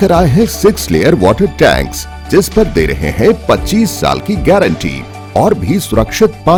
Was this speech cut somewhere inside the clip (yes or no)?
no